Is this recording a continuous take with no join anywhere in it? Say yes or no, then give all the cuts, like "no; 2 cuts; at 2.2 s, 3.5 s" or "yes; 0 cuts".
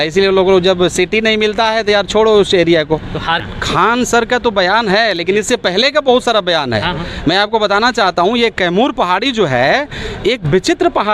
no; 1 cut; at 3.5 s